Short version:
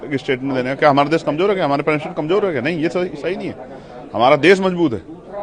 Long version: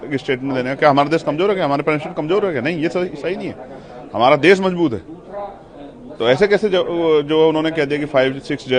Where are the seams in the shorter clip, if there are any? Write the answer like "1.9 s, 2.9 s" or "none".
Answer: none